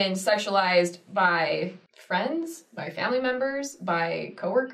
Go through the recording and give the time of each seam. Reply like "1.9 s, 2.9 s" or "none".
1.9 s